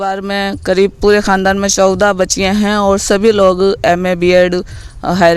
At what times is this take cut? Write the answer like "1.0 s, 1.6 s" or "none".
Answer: none